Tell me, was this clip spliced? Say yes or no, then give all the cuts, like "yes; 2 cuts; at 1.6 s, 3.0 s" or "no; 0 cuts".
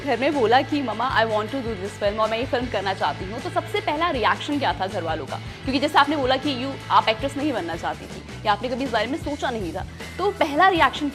no; 0 cuts